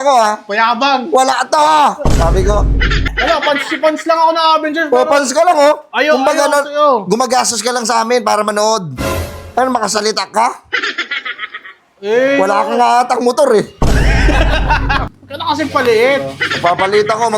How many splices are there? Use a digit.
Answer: 2